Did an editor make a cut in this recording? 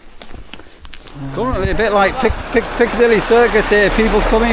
yes; 1 cut; at 1.4 s

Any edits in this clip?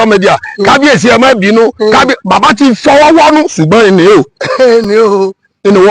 no; 0 cuts

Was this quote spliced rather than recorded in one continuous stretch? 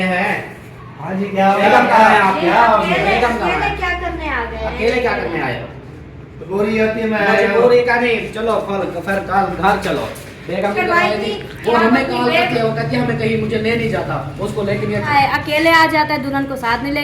yes; 4 cuts; at 1.6 s, 6.3 s, 10.7 s, 15.1 s

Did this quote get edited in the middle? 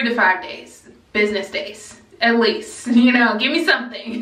no; 0 cuts

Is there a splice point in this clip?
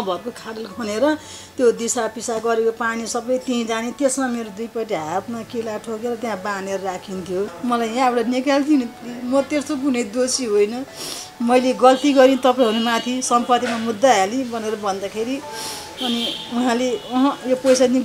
yes; 1 cut; at 7.5 s

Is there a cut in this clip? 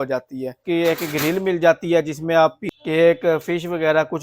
yes; 2 cuts; at 1.0 s, 2.8 s

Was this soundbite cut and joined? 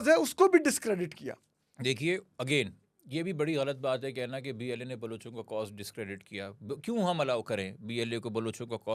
no; 0 cuts

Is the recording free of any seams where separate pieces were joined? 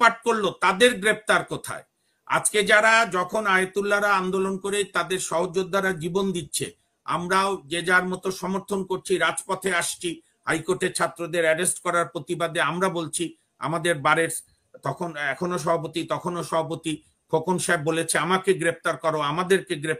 yes; 0 cuts

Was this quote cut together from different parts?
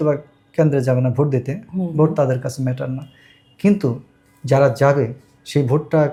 no; 0 cuts

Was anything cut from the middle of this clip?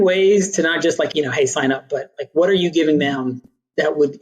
yes; 1 cut; at 1.1 s

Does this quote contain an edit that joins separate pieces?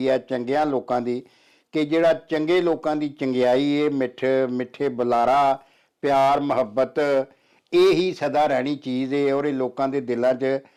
no; 0 cuts

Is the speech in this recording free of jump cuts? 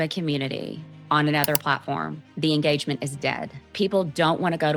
no; 1 cut; at 3.7 s

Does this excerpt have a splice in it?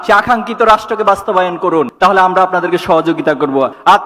no; 0 cuts

